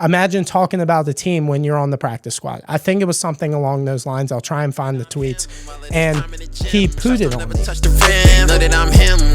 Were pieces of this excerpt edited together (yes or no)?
yes